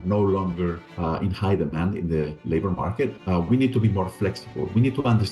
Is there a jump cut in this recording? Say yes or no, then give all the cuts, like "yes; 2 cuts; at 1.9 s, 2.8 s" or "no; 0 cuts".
yes; 1 cut; at 3.2 s